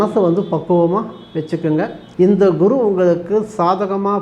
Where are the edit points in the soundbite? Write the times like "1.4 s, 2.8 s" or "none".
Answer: 2.0 s